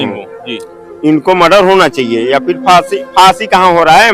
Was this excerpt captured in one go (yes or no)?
yes